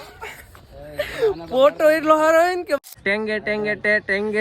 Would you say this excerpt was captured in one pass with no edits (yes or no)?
no